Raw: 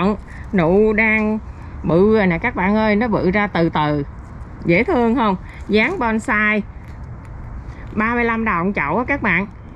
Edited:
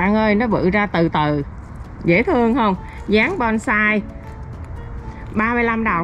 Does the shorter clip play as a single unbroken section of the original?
yes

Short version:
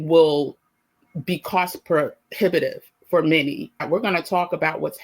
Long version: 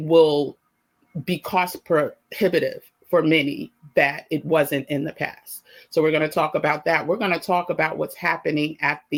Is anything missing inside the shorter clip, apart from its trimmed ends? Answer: yes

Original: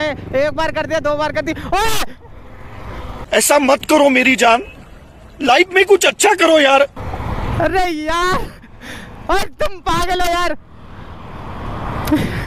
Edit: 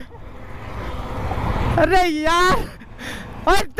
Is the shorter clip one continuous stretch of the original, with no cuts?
no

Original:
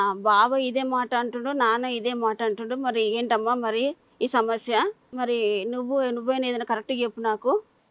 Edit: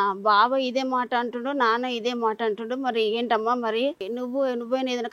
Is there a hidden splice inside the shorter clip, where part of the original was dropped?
yes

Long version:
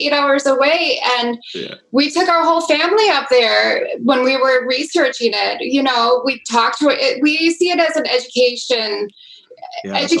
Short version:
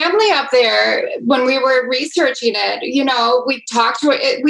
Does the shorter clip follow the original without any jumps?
yes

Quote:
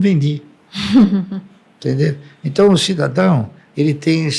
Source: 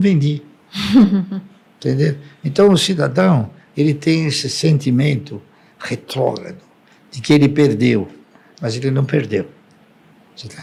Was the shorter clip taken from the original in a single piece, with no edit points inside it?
yes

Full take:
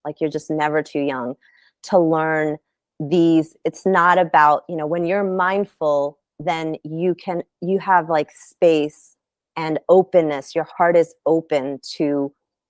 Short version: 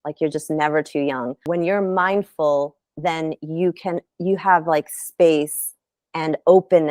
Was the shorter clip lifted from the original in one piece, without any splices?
no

